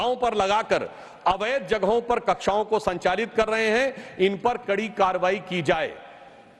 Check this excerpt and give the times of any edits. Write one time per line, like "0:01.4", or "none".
none